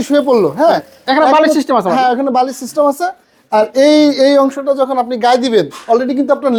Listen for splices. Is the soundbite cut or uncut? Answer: uncut